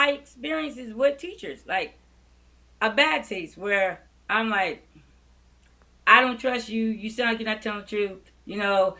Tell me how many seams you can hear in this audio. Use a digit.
0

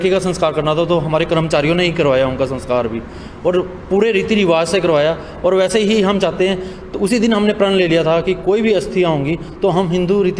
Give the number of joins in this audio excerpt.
0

